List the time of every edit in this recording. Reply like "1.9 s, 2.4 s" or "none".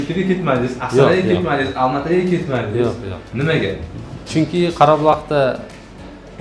none